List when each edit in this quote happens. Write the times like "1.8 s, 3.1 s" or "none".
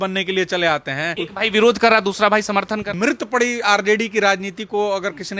1.2 s, 2.9 s